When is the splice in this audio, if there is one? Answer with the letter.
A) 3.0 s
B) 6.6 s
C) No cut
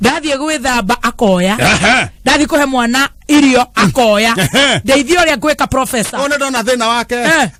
C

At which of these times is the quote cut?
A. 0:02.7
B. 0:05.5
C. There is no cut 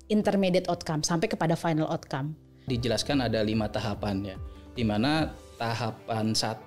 A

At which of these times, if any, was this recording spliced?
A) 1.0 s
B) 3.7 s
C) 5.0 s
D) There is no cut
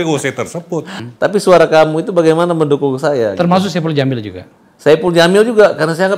A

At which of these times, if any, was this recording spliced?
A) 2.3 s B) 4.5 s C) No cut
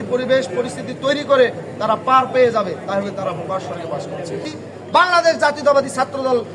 B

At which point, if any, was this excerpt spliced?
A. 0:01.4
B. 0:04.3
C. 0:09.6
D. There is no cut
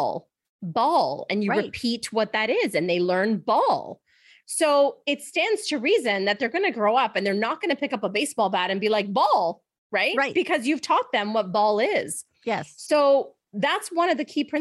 B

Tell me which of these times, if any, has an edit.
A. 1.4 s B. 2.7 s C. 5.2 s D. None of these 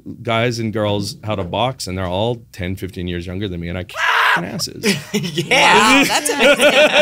D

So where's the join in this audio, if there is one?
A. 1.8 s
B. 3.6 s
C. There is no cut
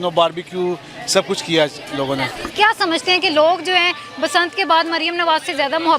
C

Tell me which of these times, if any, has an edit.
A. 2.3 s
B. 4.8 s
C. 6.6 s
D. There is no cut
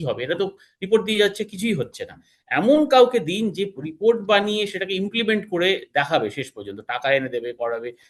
D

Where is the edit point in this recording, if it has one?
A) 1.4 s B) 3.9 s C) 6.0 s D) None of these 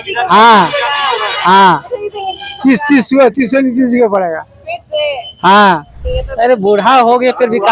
C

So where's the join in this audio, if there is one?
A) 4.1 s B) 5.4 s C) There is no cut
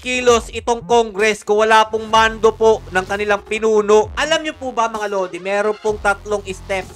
A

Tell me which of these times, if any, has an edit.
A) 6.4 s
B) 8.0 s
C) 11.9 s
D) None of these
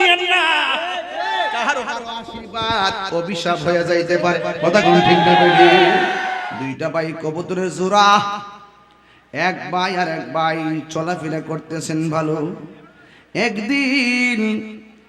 A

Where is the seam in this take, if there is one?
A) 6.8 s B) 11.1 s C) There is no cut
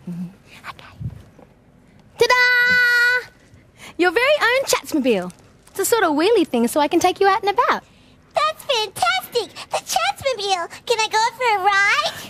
B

